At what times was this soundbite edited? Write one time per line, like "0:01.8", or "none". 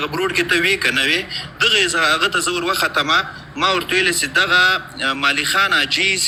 none